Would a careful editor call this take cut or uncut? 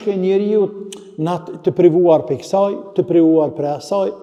uncut